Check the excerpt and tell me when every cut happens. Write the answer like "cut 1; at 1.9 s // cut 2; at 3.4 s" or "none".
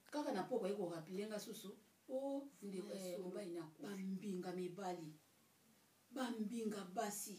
cut 1; at 3.7 s

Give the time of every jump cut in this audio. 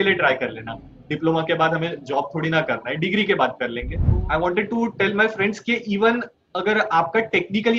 cut 1; at 4.1 s

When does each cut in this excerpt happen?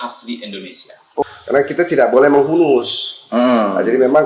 cut 1; at 1.2 s

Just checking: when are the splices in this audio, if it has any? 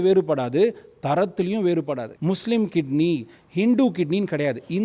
cut 1; at 2.1 s

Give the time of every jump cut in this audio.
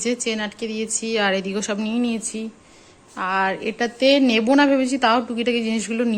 none

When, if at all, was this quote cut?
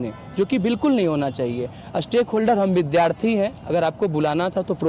none

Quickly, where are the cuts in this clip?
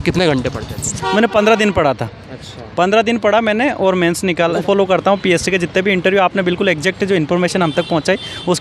cut 1; at 1.0 s // cut 2; at 4.6 s

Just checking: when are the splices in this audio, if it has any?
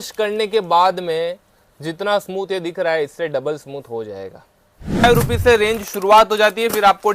cut 1; at 5.0 s

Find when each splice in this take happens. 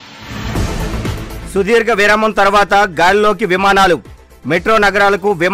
cut 1; at 1.0 s

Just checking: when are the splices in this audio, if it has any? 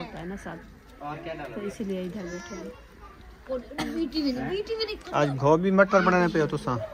none

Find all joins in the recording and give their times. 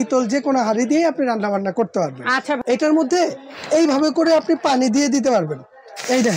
cut 1; at 2.6 s

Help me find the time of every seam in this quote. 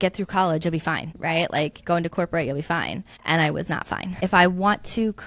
cut 1; at 1.1 s // cut 2; at 3.1 s // cut 3; at 4.1 s

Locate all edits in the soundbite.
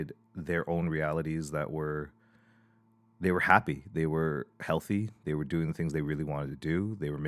none

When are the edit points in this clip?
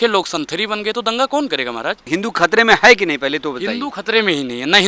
cut 1; at 2.1 s

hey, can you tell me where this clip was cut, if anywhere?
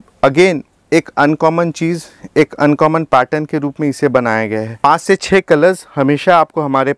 cut 1; at 4.8 s

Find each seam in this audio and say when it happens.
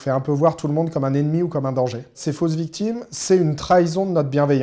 cut 1; at 2.2 s

